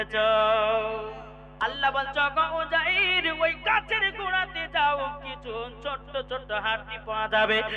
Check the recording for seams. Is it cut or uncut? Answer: cut